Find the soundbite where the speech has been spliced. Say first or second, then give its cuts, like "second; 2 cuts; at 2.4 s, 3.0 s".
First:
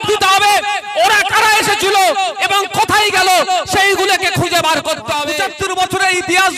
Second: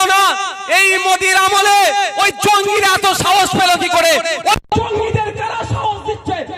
first; 1 cut; at 5.2 s